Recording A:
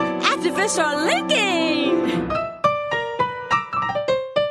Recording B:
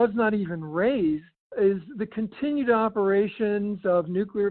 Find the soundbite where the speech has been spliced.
B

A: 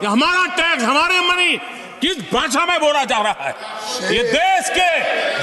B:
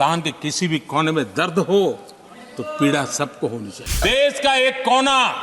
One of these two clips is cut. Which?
B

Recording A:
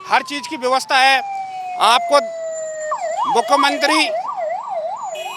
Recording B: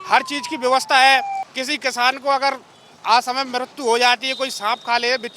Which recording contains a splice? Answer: B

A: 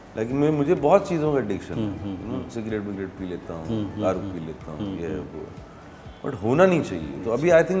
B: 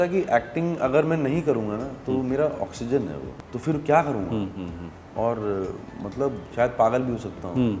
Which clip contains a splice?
B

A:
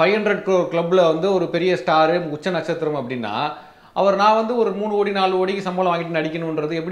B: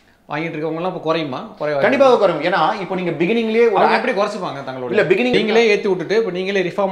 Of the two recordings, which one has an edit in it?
B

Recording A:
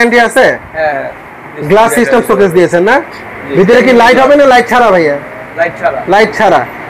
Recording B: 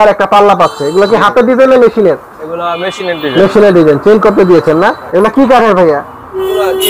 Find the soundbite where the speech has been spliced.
B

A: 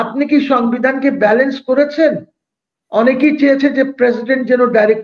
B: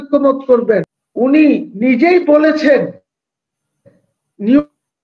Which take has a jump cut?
B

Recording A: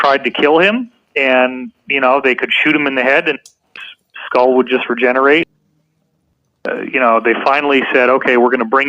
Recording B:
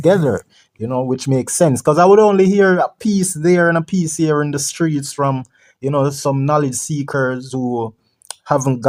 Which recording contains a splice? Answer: A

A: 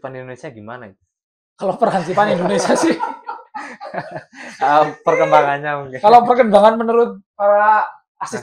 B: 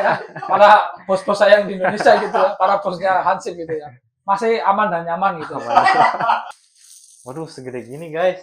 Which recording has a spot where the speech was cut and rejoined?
B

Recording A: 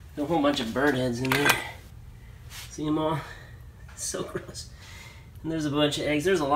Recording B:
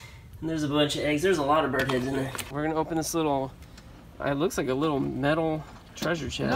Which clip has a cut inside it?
B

